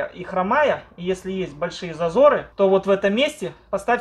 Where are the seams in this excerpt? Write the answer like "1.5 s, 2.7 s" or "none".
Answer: 2.5 s